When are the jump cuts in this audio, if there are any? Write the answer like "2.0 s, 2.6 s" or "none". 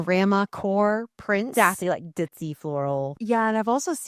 1.8 s